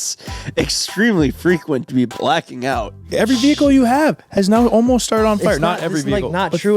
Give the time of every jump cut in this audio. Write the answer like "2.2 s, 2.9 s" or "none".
3.0 s